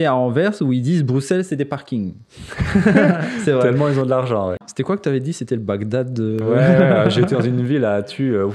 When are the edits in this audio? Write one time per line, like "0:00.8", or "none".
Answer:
0:04.5